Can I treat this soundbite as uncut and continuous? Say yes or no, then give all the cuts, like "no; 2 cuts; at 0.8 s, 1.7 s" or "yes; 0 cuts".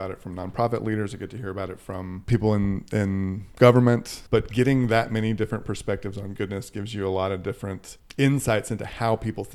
no; 3 cuts; at 2.1 s, 4.1 s, 8.0 s